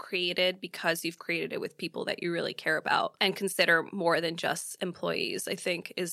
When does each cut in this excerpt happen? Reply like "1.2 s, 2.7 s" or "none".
none